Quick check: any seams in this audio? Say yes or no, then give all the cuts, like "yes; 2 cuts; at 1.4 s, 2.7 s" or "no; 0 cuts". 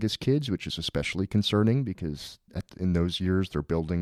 no; 0 cuts